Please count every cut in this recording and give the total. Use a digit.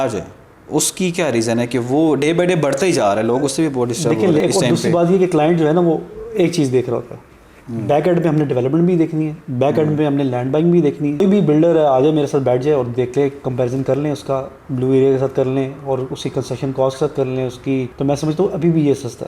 3